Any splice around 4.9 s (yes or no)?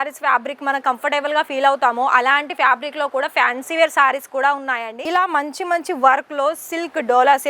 yes